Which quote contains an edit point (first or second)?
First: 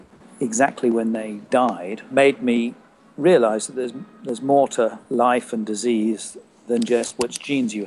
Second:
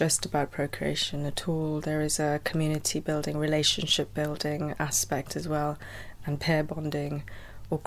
first